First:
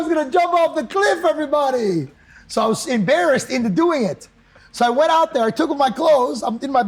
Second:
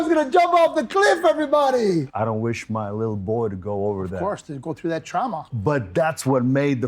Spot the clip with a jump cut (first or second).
second